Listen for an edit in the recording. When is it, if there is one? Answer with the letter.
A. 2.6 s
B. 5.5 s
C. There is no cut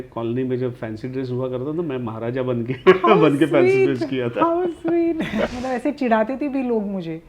B